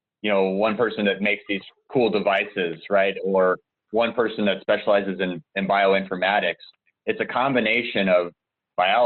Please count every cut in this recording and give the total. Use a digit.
0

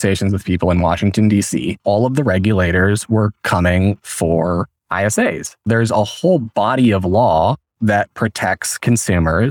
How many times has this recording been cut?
2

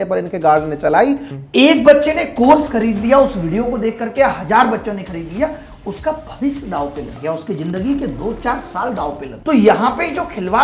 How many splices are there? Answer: 2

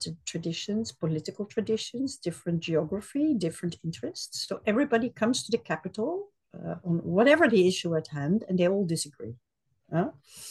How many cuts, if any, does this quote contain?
0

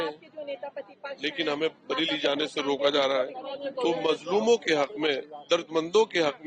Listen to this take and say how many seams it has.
1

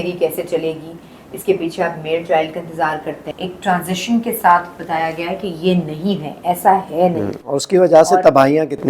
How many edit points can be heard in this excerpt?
1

